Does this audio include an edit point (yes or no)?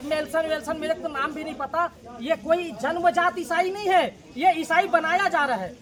no